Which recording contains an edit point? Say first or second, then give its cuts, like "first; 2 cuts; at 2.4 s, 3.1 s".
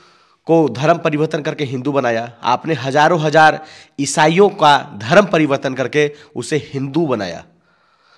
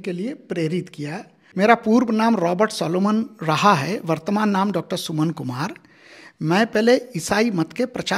second; 1 cut; at 1.4 s